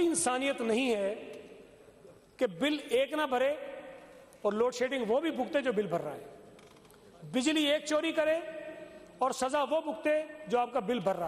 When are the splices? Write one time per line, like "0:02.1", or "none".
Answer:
none